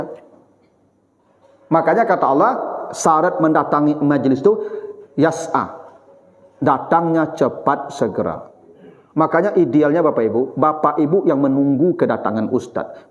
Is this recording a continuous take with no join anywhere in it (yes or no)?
yes